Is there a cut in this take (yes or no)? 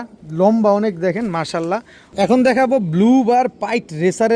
yes